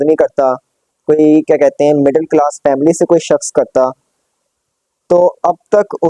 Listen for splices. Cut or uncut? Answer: uncut